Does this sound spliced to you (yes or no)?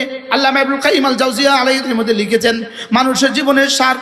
yes